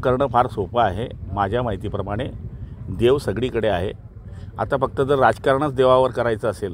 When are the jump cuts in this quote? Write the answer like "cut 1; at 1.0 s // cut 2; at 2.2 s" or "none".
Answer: none